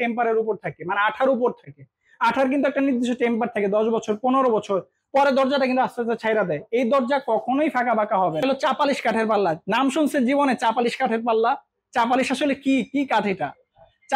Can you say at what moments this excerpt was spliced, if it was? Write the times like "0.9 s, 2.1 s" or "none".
8.4 s